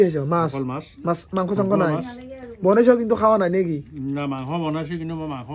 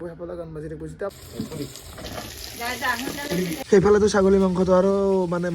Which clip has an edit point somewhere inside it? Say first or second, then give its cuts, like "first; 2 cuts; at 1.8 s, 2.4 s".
second; 2 cuts; at 1.1 s, 3.7 s